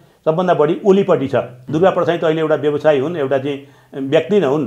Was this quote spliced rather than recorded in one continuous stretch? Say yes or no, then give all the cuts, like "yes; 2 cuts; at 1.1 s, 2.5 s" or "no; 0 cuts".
yes; 1 cut; at 1.6 s